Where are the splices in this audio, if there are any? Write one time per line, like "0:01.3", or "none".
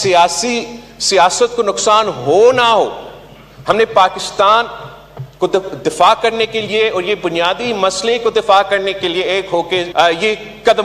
0:09.9